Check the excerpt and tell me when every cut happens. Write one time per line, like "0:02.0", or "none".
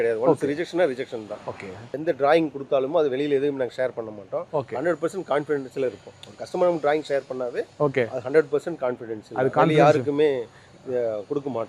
0:01.8